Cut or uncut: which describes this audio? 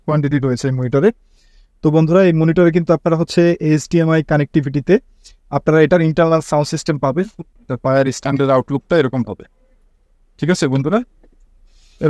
cut